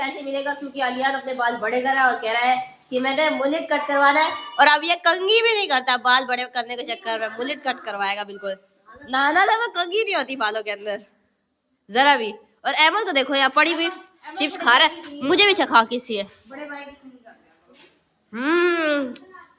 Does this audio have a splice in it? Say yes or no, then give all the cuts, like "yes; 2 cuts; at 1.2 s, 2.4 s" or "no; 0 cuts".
no; 0 cuts